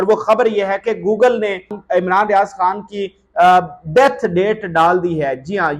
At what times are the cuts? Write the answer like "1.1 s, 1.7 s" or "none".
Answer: 1.8 s